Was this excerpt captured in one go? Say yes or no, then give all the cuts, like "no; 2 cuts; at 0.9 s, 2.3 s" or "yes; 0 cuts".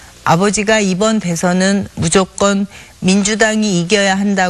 no; 1 cut; at 3.1 s